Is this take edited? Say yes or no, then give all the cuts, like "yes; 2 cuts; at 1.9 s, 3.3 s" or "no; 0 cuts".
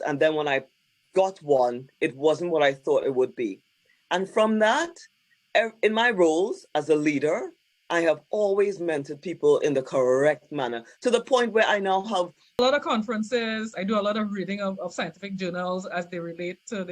yes; 1 cut; at 12.6 s